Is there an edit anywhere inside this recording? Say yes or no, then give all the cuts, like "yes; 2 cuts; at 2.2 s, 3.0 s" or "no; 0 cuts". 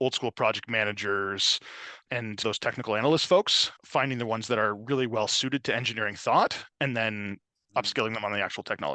no; 0 cuts